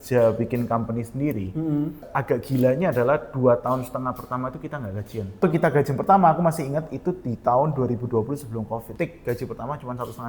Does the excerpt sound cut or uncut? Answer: cut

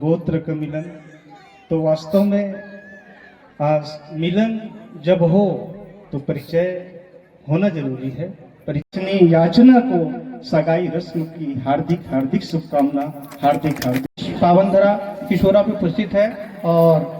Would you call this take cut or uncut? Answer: cut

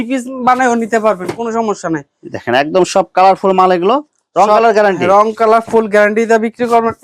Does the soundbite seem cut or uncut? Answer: uncut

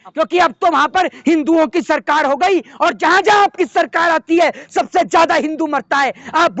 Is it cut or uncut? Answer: uncut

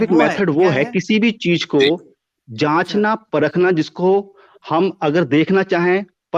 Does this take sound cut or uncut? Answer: uncut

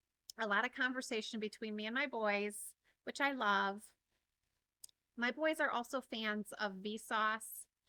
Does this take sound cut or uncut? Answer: uncut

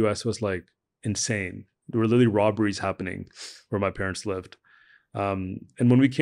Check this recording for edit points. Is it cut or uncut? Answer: uncut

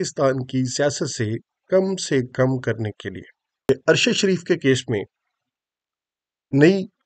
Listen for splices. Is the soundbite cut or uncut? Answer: cut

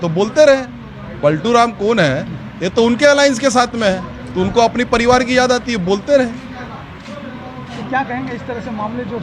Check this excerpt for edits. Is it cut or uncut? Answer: uncut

